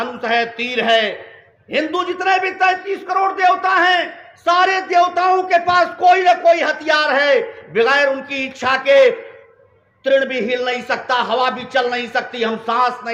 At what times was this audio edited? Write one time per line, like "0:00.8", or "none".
none